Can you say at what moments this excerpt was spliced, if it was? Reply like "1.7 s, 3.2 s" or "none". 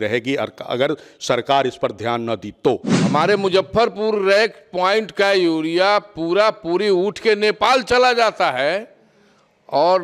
2.9 s